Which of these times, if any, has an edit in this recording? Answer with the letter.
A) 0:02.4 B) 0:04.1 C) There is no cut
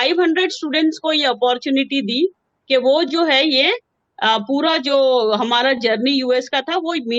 C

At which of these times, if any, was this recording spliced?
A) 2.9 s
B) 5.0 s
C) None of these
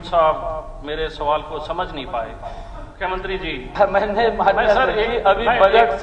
A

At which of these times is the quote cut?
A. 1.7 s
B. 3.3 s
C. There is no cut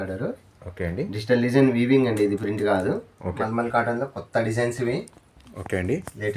B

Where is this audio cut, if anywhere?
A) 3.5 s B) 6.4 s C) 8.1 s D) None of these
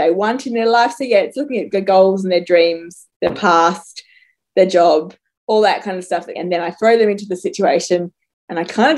B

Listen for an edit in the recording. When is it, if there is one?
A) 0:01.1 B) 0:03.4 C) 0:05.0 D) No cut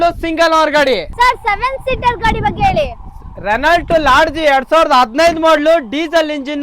A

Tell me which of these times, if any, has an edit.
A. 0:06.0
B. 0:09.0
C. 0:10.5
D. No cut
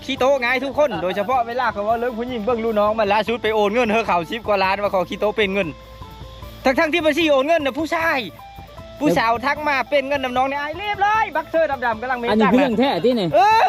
D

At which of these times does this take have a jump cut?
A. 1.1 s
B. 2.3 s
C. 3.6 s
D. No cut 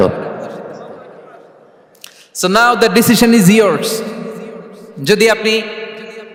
D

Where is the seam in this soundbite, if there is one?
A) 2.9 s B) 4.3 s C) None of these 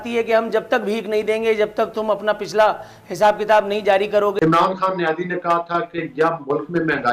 B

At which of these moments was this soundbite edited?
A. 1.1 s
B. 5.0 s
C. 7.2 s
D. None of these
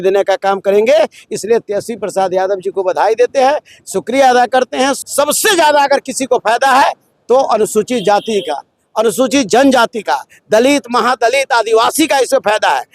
B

